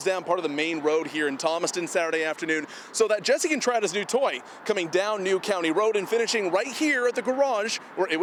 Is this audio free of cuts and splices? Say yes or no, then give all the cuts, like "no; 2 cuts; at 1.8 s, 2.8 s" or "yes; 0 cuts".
yes; 0 cuts